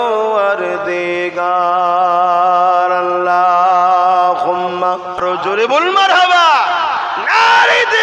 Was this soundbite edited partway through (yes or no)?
yes